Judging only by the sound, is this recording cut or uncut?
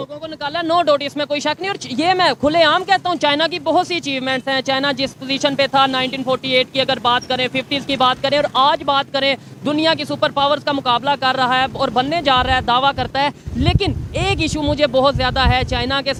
uncut